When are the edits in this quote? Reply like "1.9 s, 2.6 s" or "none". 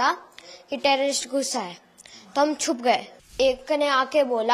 3.3 s